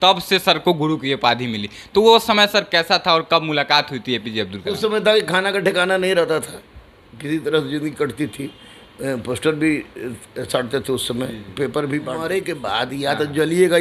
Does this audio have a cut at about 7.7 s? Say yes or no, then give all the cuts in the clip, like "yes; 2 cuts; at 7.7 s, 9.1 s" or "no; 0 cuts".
no; 1 cut; at 12.1 s